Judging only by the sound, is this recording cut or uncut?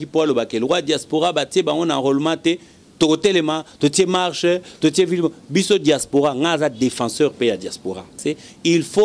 cut